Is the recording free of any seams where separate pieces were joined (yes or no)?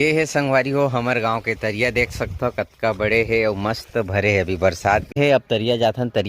no